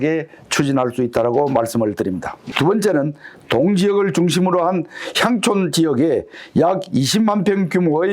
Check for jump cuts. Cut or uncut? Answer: cut